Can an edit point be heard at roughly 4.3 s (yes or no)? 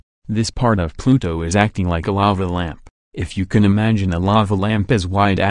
no